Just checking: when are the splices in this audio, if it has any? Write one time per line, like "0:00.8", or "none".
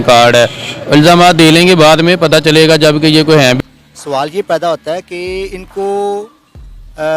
0:03.6